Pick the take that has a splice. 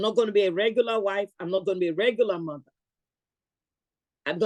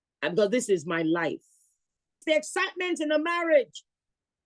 second; 1 cut; at 2.2 s

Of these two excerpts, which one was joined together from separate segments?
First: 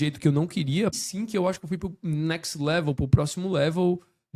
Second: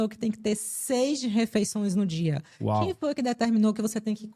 first; 1 cut; at 1.0 s

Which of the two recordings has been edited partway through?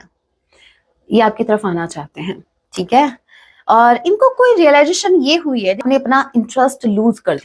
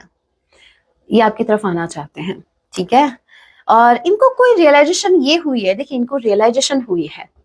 first; 1 cut; at 5.8 s

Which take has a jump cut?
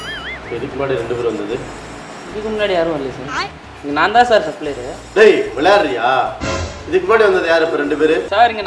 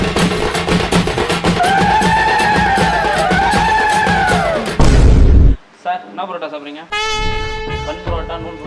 second; 1 cut; at 1.6 s

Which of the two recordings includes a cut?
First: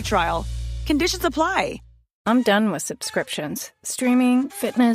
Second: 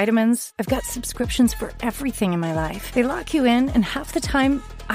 first; 1 cut; at 2.1 s

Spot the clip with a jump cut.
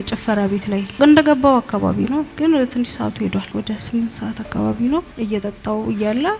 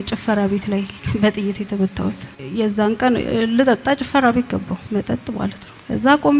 first; 1 cut; at 1.0 s

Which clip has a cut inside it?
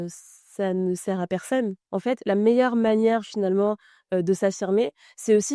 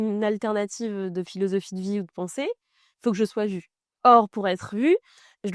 first; 1 cut; at 1.8 s

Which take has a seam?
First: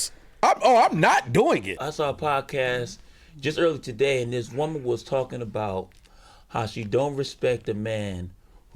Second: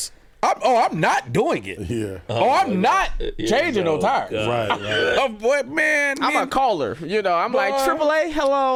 first; 1 cut; at 1.8 s

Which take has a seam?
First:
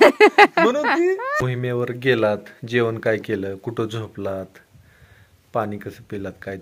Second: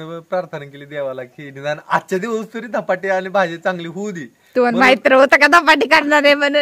first; 1 cut; at 1.3 s

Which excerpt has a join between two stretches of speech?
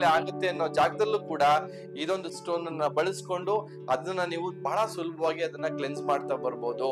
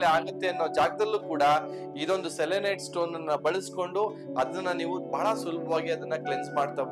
first; 1 cut; at 2.3 s

